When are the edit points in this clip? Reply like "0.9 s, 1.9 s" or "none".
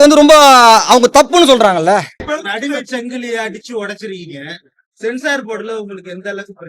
2.2 s